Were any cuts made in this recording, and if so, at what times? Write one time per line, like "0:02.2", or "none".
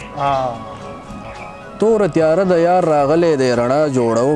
0:01.2